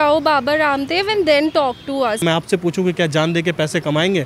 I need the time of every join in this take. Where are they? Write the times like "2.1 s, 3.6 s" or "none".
2.2 s